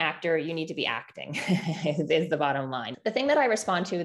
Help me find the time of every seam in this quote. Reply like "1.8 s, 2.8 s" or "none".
2.9 s